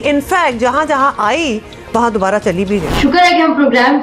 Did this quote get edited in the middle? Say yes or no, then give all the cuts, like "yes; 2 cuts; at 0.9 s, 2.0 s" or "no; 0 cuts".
yes; 1 cut; at 2.9 s